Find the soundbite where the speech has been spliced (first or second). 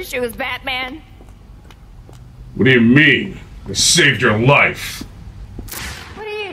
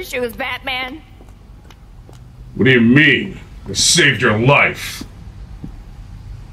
first